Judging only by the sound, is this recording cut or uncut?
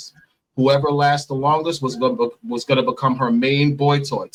uncut